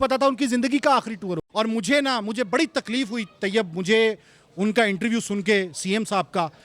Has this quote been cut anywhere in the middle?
yes; 1 cut; at 1.9 s

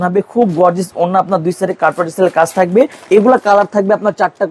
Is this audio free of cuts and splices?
no; 1 cut; at 3.0 s

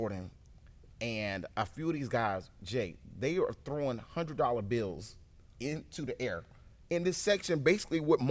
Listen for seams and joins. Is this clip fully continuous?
yes; 0 cuts

